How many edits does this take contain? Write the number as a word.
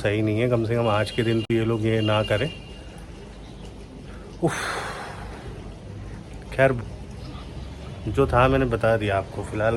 zero